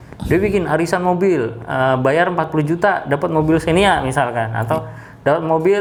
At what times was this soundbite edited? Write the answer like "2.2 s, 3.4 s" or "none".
none